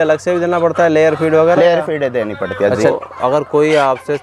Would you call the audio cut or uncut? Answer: cut